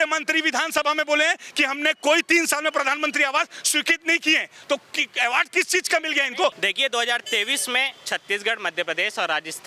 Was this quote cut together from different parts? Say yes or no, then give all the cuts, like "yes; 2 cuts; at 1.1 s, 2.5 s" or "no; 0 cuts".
yes; 1 cut; at 6.6 s